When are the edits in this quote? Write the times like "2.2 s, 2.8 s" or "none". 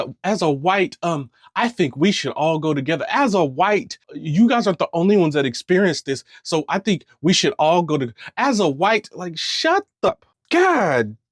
10.1 s